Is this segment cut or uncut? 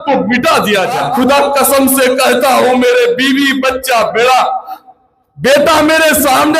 cut